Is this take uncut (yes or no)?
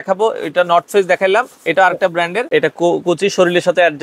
no